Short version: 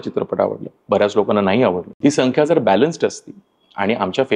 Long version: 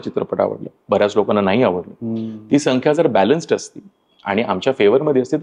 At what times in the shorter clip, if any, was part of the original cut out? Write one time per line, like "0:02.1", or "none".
0:01.9